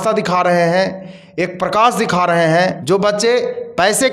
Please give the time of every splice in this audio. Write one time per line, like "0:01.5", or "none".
0:02.8